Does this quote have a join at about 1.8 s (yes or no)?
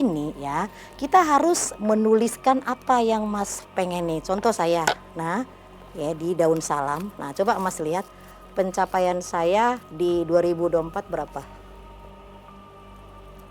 yes